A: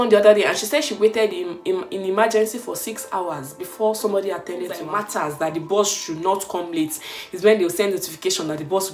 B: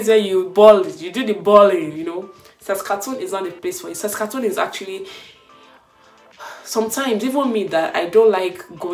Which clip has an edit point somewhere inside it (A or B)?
A